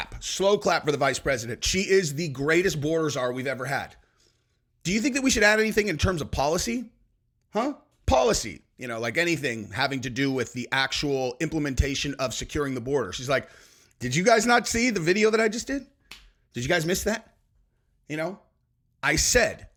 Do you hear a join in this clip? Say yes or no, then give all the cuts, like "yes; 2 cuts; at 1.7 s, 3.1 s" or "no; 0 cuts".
no; 0 cuts